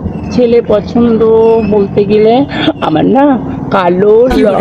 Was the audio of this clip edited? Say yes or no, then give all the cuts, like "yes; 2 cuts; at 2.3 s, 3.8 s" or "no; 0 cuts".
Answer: no; 0 cuts